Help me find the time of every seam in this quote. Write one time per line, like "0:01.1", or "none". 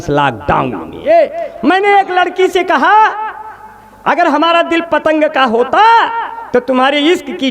0:01.0